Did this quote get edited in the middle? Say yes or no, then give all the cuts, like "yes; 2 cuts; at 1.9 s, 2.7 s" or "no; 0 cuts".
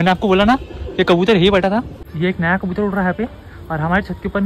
yes; 1 cut; at 2.0 s